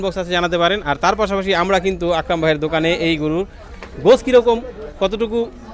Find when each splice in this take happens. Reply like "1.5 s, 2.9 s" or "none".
none